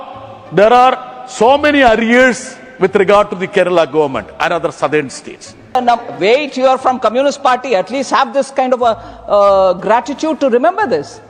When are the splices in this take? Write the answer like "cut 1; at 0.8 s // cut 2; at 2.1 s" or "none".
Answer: cut 1; at 5.7 s